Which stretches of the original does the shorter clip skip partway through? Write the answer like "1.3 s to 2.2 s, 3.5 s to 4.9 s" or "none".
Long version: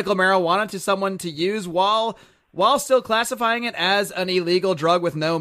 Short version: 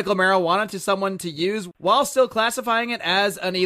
1.6 s to 2.4 s